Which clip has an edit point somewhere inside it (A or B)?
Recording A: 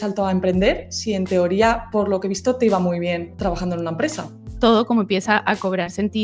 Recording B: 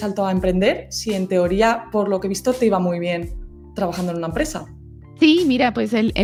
A